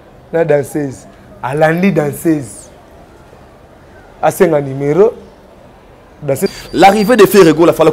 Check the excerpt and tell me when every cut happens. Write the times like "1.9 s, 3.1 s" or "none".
6.5 s